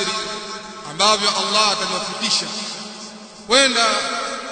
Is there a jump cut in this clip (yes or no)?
no